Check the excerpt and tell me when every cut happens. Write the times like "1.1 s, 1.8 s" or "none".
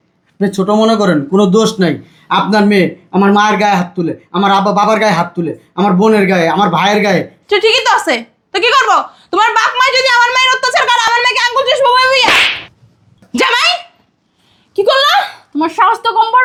none